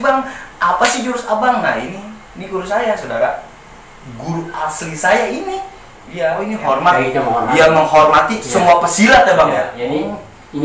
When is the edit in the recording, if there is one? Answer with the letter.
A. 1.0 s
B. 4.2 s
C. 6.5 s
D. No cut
C